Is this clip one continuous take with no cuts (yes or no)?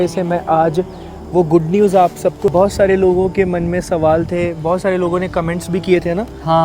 no